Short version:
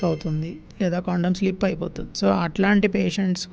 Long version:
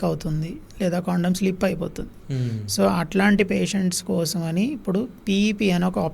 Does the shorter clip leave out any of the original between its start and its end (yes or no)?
yes